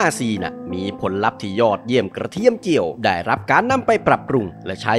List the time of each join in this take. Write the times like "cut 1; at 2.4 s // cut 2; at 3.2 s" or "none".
none